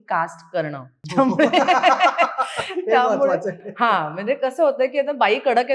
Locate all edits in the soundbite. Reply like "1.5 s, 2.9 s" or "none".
0.9 s